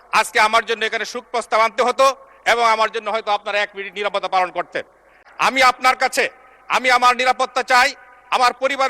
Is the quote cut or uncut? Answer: cut